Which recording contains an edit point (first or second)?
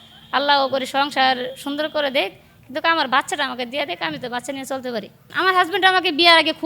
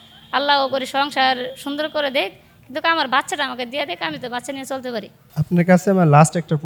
first